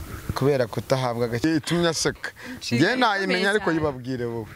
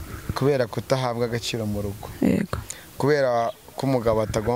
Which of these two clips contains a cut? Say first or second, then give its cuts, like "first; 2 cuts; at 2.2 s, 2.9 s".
first; 1 cut; at 1.4 s